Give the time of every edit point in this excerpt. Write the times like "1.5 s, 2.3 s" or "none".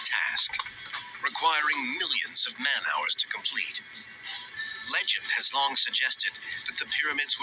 5.2 s